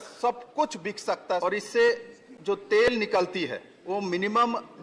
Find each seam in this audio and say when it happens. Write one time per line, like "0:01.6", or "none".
0:01.4
0:03.7